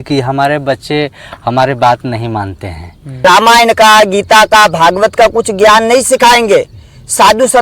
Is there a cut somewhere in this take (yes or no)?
yes